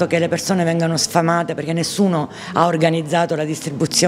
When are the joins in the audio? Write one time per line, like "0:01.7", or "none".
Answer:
none